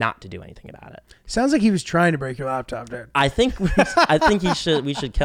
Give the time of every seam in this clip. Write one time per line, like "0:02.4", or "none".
none